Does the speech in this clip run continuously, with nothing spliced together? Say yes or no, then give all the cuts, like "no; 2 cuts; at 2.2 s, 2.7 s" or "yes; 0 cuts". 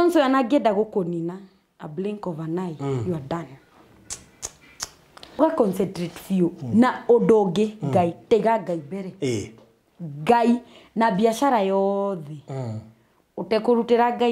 no; 1 cut; at 5.4 s